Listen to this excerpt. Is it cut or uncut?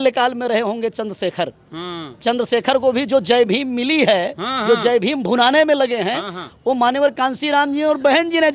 uncut